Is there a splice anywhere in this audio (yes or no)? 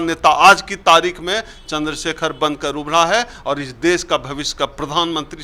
no